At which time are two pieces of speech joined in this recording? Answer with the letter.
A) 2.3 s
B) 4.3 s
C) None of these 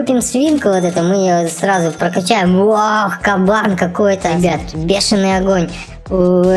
B